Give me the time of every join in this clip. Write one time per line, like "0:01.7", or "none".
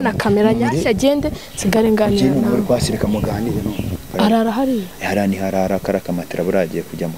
0:04.0

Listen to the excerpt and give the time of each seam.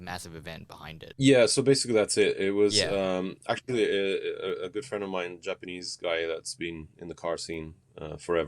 0:01.0

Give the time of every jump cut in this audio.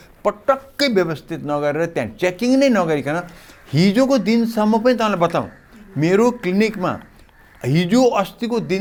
none

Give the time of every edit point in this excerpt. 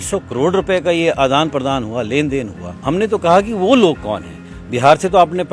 0:02.6

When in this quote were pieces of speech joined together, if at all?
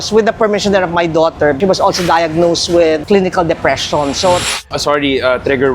0:01.6
0:04.6

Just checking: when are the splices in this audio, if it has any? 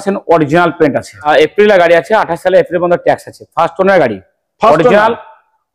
0:01.3

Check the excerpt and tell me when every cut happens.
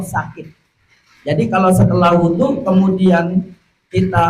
none

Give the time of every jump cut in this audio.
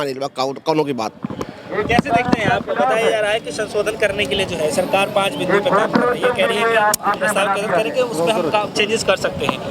none

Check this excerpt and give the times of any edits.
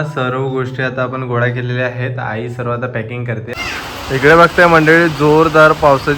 0:03.4

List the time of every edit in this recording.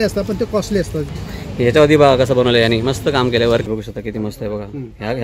0:01.1
0:03.7

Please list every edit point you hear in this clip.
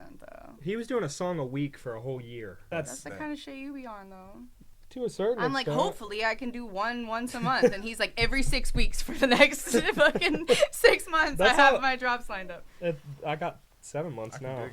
0:02.6

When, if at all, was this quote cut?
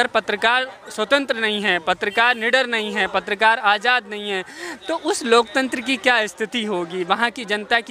none

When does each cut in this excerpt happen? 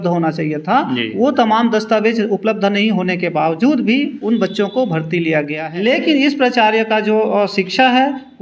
0:05.6

